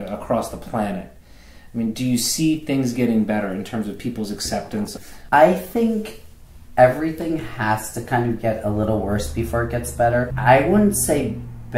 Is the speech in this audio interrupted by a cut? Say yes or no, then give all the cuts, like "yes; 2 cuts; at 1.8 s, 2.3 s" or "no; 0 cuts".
yes; 2 cuts; at 4.9 s, 10.3 s